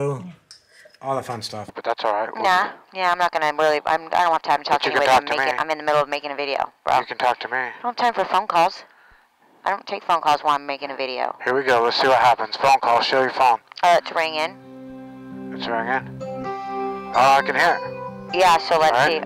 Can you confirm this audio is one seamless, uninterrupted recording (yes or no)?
no